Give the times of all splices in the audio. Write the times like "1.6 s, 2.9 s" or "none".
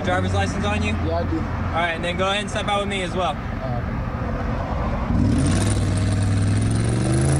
none

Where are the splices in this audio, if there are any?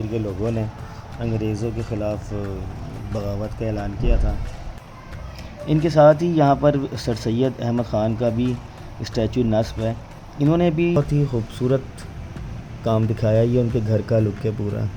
11.0 s

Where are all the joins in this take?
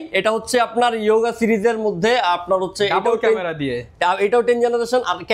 none

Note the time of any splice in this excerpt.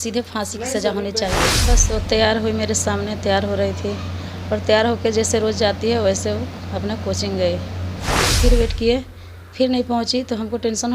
1.6 s, 8.4 s

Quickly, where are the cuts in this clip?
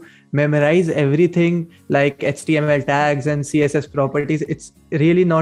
none

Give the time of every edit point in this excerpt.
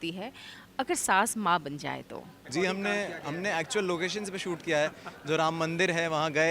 2.4 s

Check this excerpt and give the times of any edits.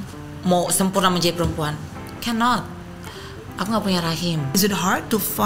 4.5 s

